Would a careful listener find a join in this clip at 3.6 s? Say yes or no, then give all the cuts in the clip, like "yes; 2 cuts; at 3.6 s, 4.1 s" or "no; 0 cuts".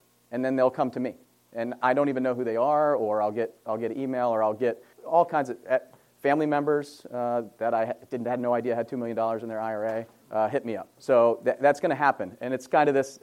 no; 2 cuts; at 4.9 s, 10.2 s